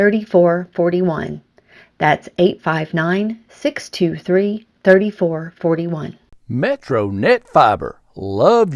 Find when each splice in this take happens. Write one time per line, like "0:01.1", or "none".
0:06.3